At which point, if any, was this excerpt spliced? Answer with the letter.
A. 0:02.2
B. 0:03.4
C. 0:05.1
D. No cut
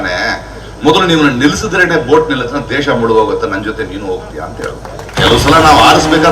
C